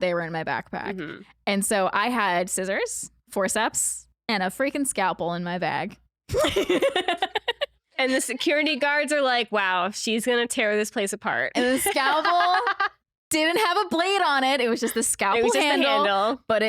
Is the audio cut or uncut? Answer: cut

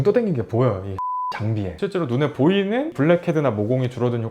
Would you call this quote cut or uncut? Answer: cut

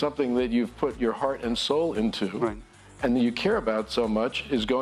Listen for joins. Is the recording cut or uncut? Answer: uncut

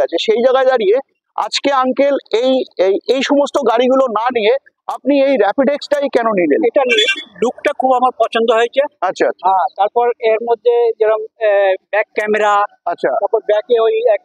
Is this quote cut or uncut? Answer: uncut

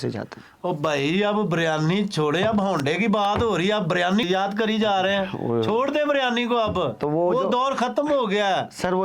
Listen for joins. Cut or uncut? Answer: cut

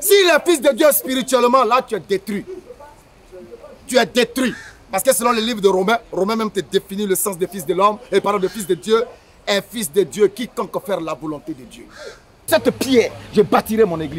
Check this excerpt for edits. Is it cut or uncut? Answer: cut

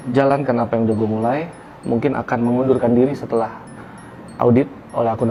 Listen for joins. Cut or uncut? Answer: uncut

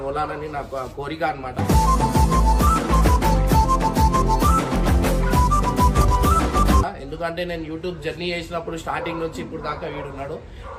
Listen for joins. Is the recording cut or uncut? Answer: uncut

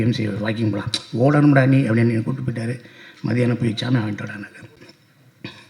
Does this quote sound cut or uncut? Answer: cut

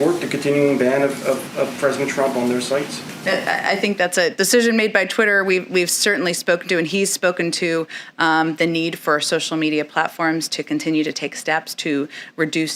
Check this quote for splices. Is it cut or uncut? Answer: uncut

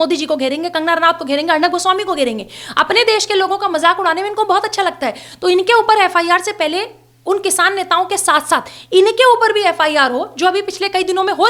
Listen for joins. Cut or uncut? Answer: uncut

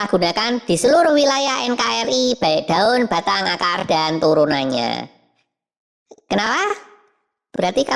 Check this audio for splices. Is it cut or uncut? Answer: uncut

